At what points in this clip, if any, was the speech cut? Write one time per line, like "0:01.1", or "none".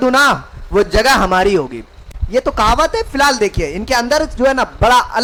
none